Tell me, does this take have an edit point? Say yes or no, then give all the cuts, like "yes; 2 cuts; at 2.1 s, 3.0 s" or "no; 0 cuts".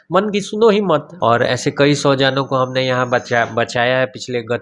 yes; 1 cut; at 1.1 s